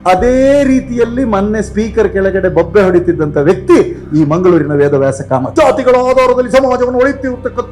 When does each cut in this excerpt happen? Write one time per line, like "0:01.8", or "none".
0:05.5